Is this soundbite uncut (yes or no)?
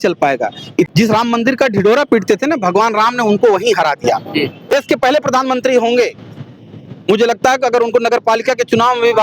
no